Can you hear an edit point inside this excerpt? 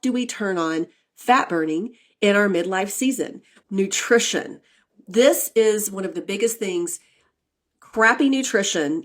yes; 1 cut; at 3.5 s

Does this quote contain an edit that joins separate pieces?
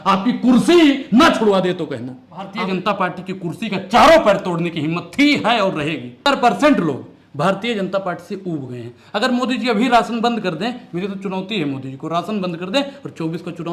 yes; 2 cuts; at 2.5 s, 6.2 s

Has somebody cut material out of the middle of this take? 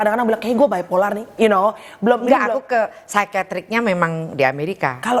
no; 0 cuts

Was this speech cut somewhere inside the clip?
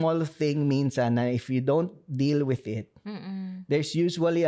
no; 0 cuts

